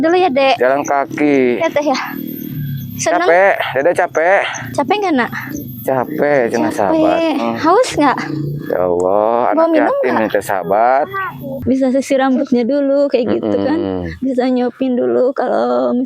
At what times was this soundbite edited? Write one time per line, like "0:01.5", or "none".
0:11.6